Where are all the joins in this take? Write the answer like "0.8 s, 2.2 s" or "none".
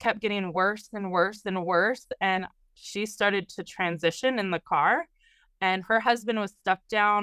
none